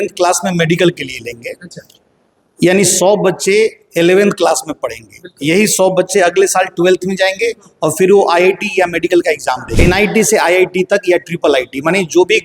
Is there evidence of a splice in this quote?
yes; 1 cut; at 9.7 s

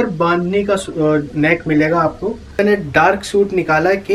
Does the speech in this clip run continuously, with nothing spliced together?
no; 1 cut; at 2.6 s

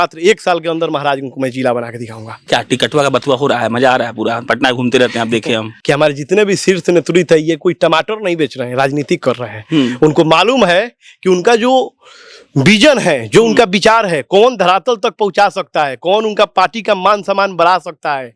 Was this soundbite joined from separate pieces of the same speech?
yes; 2 cuts; at 2.3 s, 5.7 s

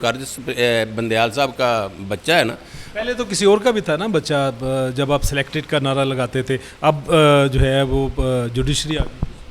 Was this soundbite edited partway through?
no; 0 cuts

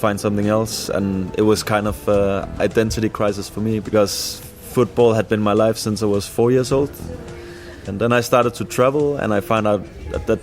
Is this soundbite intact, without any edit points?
no; 3 cuts; at 3.9 s, 7.9 s, 9.5 s

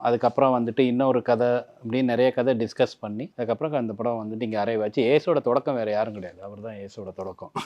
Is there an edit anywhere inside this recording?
yes; 1 cut; at 3.3 s

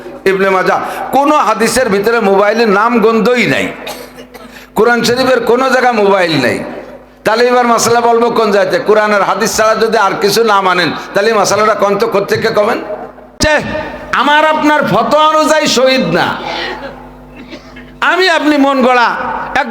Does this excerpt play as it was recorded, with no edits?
no; 1 cut; at 13.4 s

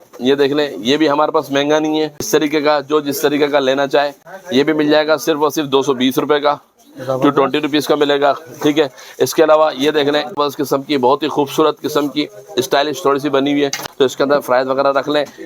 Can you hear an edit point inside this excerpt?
yes; 3 cuts; at 2.3 s, 10.4 s, 13.8 s

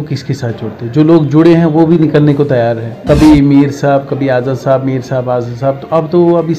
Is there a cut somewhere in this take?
yes; 1 cut; at 2.9 s

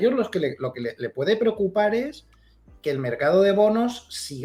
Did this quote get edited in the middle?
no; 0 cuts

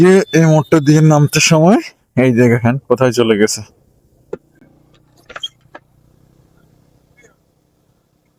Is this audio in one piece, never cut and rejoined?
yes; 0 cuts

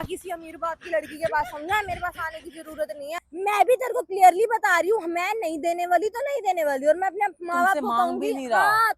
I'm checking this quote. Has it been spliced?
yes; 1 cut; at 3.2 s

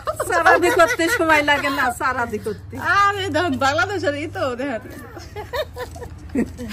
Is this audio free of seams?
yes; 0 cuts

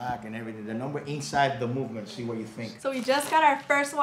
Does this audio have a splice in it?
yes; 1 cut; at 2.8 s

